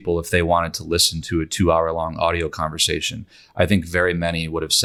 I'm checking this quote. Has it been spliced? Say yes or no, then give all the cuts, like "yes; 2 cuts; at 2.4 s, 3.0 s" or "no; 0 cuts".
no; 0 cuts